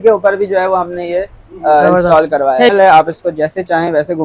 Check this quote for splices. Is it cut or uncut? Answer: cut